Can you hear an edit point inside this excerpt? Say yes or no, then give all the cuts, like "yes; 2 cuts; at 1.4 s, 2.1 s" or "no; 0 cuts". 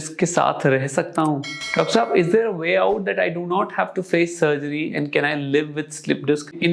no; 0 cuts